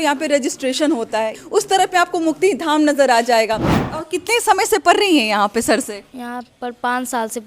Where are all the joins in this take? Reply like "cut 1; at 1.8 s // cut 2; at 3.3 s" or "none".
cut 1; at 1.4 s // cut 2; at 3.7 s